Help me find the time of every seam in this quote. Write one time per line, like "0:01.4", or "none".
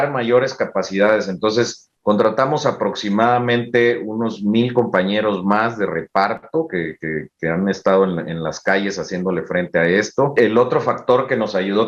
0:10.3